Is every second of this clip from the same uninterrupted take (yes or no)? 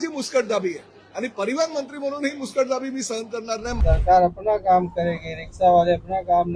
no